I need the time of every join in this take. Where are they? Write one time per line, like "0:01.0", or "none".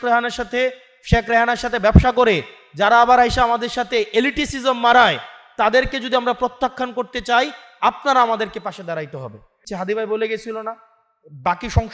0:09.7